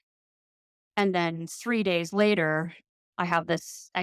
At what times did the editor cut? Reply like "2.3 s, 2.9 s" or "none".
3.0 s